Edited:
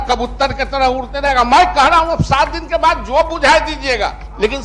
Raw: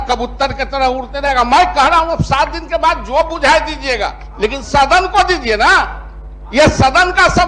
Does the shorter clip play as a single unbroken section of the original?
yes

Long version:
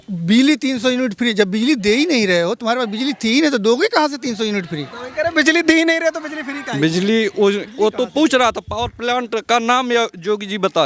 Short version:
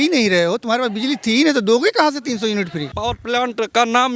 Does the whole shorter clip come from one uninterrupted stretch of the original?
no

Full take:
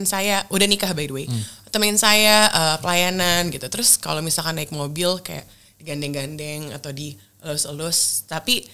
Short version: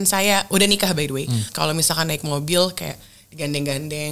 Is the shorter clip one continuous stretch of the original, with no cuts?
no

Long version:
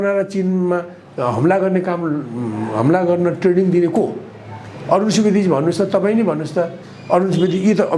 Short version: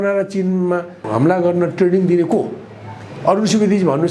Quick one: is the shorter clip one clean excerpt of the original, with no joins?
no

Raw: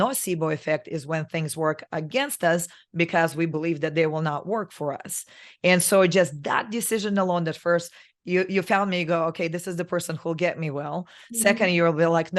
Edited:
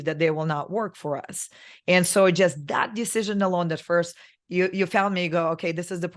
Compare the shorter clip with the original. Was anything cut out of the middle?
no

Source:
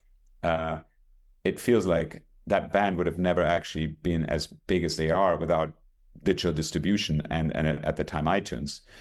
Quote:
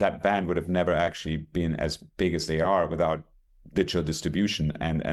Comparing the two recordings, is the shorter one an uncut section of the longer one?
yes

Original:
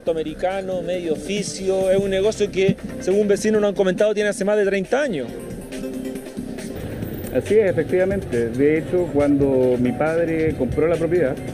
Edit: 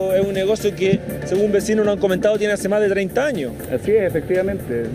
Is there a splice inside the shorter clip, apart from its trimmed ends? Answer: yes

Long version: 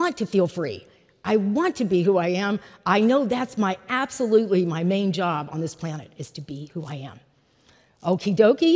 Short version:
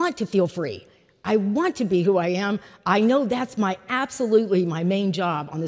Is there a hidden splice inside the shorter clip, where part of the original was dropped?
no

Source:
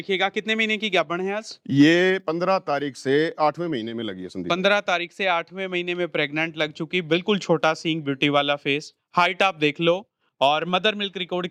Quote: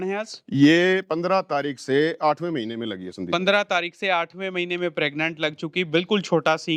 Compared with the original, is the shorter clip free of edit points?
yes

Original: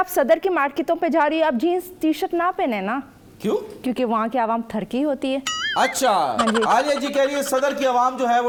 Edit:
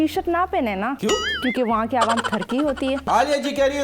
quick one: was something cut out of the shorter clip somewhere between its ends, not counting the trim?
yes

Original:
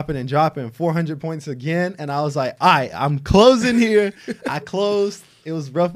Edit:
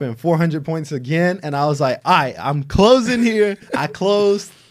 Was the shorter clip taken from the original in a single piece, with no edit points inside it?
no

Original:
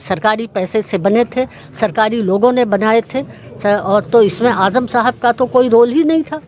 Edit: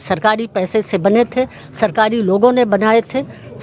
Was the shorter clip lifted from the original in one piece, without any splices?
yes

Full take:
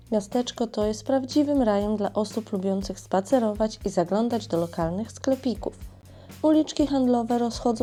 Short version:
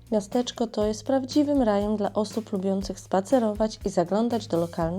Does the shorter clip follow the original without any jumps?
yes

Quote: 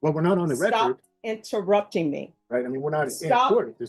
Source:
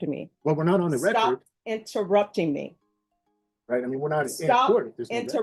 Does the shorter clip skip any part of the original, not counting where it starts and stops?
yes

